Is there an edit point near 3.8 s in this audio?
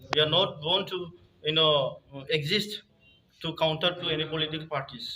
no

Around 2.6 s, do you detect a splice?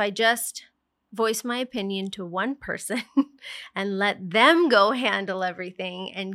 no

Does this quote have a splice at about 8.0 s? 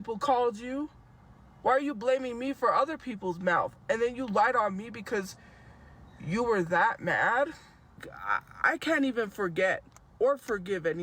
yes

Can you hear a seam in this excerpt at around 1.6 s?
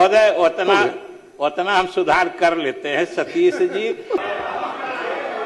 no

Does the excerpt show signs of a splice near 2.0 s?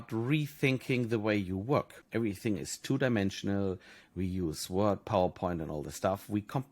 yes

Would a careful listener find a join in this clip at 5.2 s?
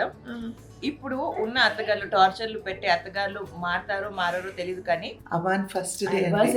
yes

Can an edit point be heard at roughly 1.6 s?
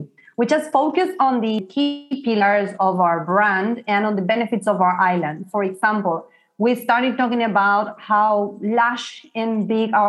yes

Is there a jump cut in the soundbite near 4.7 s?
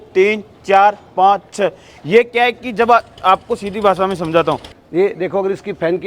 yes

